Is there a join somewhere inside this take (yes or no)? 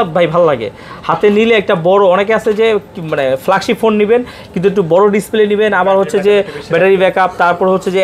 no